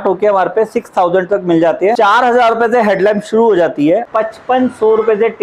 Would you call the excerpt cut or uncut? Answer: cut